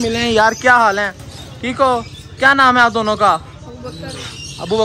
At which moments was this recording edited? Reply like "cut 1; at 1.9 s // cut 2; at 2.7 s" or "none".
none